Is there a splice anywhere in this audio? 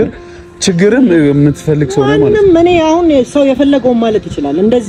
no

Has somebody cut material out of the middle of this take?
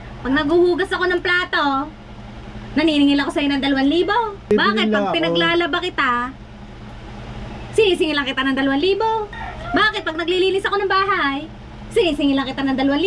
yes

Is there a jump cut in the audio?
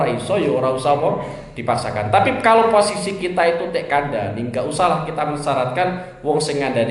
no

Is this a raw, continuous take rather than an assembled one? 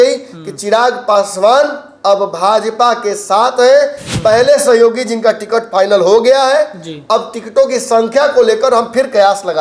no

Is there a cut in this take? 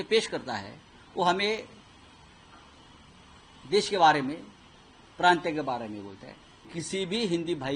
yes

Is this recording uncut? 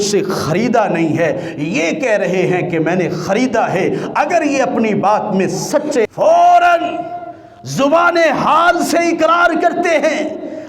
no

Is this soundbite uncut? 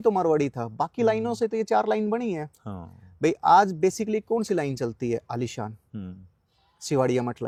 yes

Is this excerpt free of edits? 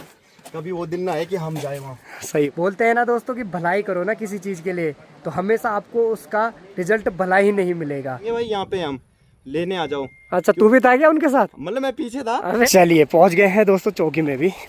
no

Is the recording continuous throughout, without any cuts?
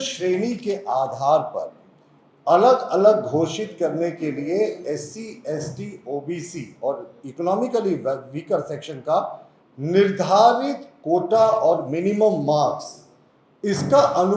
yes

